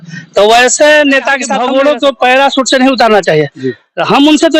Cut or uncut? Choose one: cut